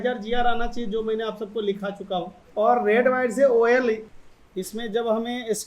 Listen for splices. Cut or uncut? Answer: cut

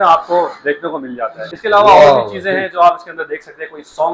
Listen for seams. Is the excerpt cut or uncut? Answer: uncut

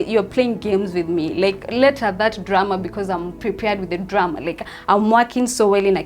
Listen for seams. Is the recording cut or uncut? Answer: uncut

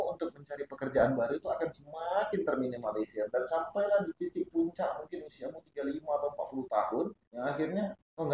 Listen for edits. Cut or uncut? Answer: uncut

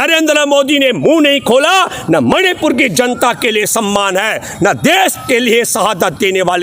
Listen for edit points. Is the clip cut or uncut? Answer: uncut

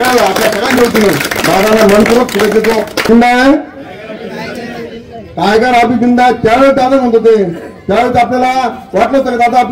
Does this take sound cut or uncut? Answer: cut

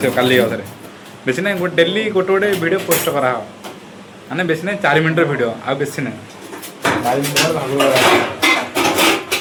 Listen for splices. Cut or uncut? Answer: uncut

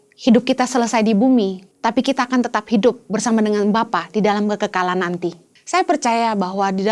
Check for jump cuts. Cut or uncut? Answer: cut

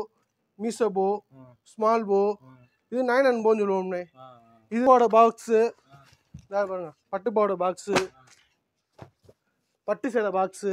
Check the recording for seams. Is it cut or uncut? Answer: cut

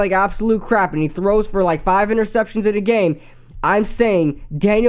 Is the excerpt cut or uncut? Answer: uncut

